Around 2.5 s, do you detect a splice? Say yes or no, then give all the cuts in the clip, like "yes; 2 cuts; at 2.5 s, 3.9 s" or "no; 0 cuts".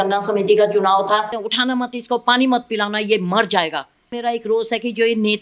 no; 2 cuts; at 1.3 s, 4.1 s